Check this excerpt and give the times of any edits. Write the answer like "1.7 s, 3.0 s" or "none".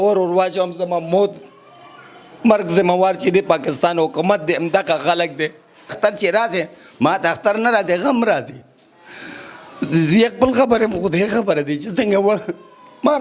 5.9 s